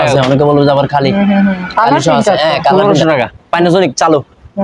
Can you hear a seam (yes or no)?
yes